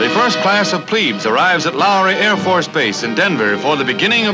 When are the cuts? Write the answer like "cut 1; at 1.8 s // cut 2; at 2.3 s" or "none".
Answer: none